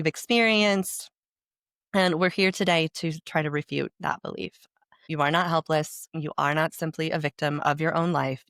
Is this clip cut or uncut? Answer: uncut